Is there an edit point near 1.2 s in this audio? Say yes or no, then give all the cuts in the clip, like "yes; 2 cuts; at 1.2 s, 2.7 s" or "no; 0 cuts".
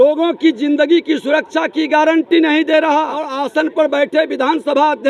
no; 1 cut; at 3.3 s